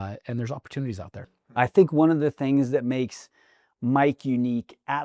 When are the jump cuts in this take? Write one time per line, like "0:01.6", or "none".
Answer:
0:01.2